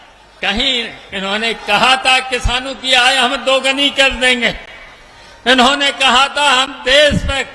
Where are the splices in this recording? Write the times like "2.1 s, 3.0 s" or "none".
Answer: none